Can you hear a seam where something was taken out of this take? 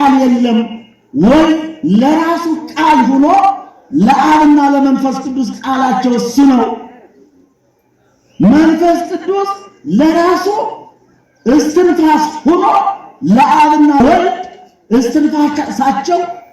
yes; 1 cut; at 14.0 s

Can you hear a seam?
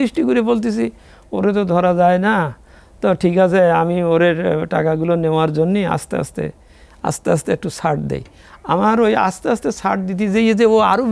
no; 0 cuts

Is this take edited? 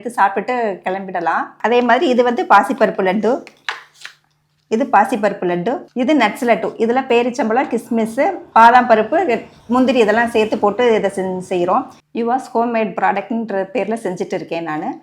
no; 0 cuts

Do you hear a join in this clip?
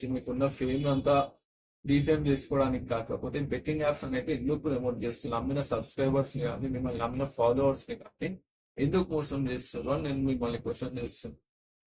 yes; 1 cut; at 5.3 s

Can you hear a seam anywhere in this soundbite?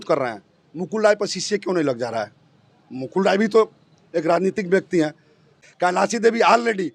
yes; 1 cut; at 5.6 s

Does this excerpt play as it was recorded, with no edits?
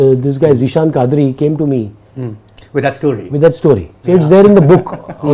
yes; 0 cuts

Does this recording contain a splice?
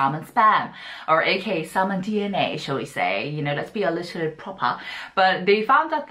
no; 0 cuts

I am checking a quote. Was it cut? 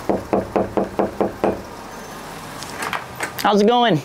no; 0 cuts

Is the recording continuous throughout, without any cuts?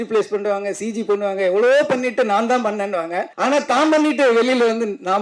no; 1 cut; at 3.3 s

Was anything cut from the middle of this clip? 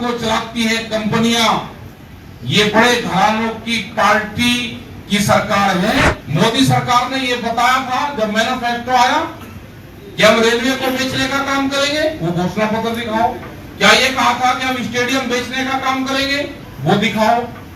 yes; 1 cut; at 6.2 s

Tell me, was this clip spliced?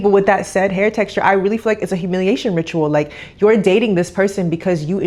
no; 0 cuts

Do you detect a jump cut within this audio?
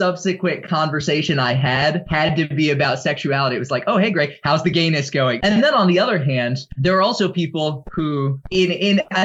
yes; 4 cuts; at 2.0 s, 5.4 s, 6.7 s, 8.4 s

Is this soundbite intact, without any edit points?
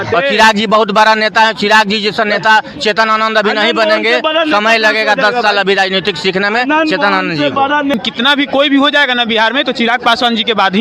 no; 1 cut; at 7.9 s

